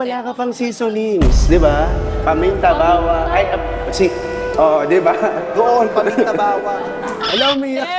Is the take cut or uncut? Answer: uncut